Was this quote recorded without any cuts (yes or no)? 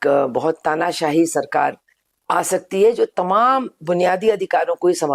yes